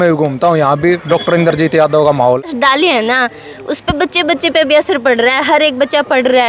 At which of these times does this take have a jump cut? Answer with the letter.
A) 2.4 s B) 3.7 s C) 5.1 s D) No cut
A